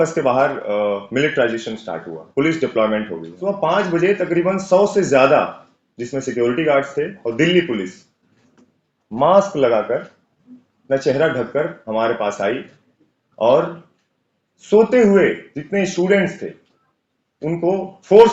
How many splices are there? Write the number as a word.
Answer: one